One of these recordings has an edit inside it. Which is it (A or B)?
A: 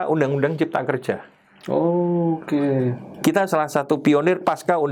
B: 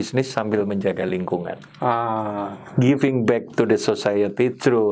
B